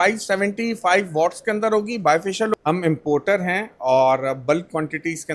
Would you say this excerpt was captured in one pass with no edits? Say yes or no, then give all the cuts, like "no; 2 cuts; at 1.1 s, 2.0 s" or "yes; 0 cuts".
no; 1 cut; at 2.5 s